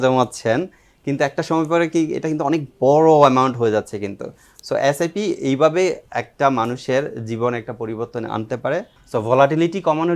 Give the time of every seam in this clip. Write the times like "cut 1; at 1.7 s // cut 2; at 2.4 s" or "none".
cut 1; at 9.0 s

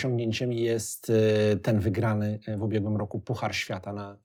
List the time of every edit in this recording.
none

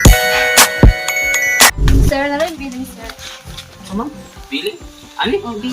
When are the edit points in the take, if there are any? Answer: cut 1; at 1.8 s

